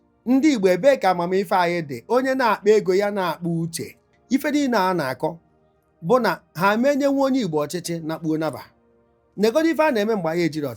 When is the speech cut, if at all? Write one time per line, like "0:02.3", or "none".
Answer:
0:04.1